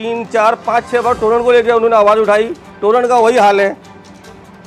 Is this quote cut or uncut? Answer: uncut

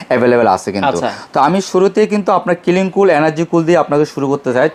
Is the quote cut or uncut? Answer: uncut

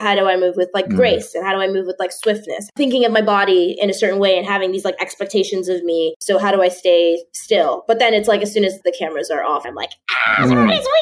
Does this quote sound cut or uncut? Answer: cut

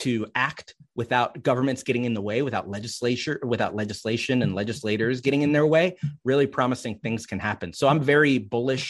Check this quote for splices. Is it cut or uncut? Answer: uncut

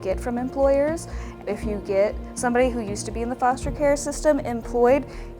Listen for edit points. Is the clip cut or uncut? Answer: cut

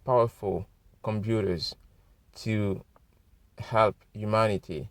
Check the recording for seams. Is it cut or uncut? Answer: uncut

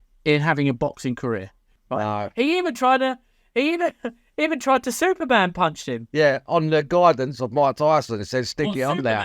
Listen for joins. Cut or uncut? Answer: cut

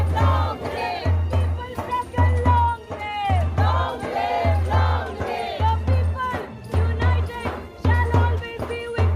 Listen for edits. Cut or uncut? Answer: uncut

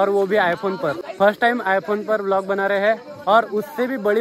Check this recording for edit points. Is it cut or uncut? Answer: uncut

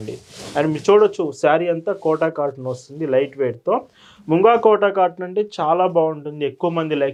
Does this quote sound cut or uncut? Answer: uncut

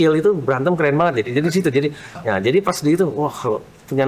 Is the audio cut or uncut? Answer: cut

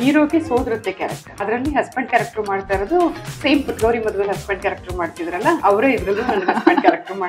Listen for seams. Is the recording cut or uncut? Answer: cut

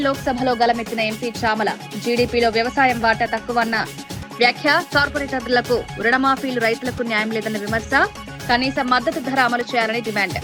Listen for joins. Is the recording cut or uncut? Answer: uncut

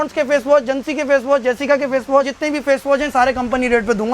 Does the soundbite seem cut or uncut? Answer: cut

